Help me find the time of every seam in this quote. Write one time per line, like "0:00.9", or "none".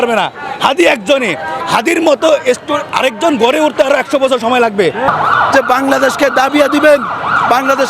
0:05.0

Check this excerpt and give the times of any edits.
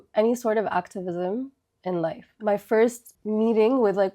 0:02.3
0:03.1

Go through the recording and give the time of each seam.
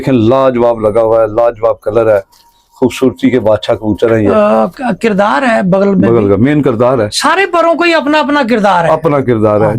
0:04.3

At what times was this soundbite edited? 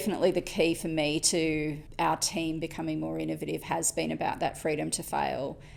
none

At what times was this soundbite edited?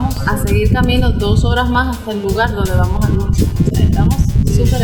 none

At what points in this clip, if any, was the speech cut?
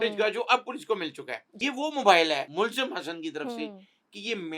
0:01.5
0:02.5

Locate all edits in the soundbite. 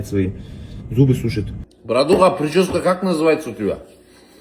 0:01.6

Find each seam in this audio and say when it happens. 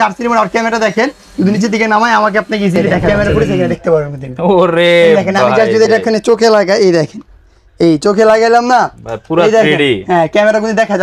0:03.1

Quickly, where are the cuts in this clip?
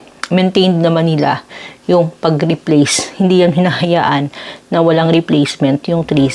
none

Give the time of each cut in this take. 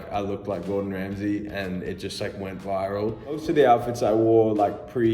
0:03.3

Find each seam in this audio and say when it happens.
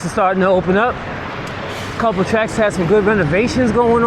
none

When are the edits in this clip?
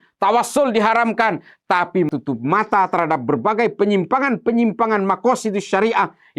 0:02.1

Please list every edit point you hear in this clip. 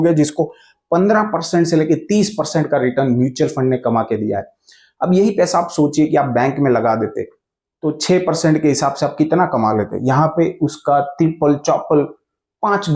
none

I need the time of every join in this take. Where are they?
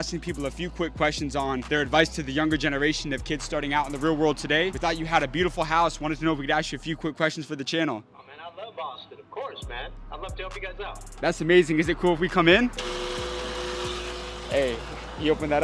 none

